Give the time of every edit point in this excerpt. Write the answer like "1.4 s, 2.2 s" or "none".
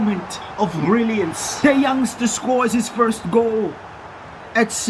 1.5 s